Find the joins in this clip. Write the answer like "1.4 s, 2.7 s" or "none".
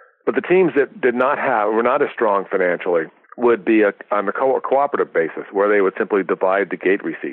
3.2 s